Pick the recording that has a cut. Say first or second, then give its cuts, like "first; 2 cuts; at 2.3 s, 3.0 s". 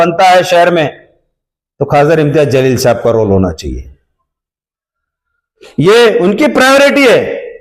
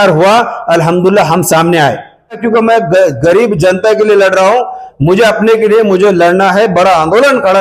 second; 1 cut; at 2.4 s